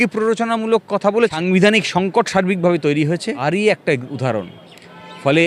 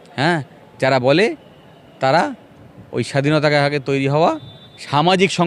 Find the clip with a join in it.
first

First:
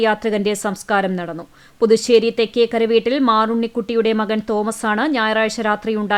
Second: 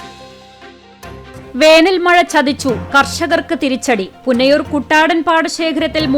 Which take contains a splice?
second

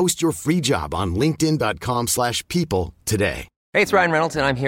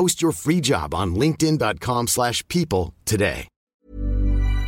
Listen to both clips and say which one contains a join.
first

